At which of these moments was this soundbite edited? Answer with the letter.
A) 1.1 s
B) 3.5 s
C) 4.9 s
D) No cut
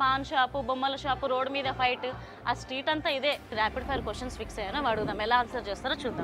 B